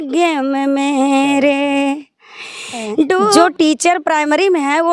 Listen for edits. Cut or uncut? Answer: cut